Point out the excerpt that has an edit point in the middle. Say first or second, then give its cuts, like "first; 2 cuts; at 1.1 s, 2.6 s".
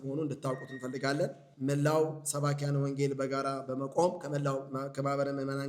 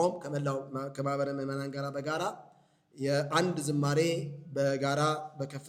first; 1 cut; at 1.5 s